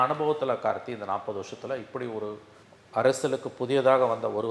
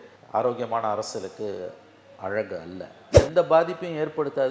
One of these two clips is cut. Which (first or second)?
second